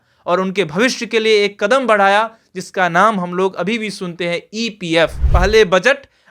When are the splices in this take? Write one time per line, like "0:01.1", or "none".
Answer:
0:05.2